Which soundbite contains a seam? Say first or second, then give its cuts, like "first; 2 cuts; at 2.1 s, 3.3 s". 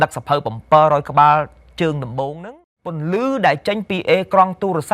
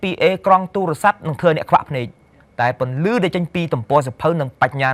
first; 1 cut; at 2.3 s